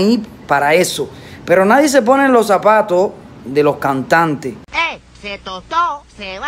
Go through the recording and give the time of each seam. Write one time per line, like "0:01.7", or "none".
0:04.6